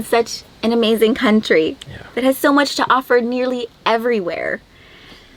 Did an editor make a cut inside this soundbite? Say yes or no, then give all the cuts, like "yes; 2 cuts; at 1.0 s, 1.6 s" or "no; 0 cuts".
no; 0 cuts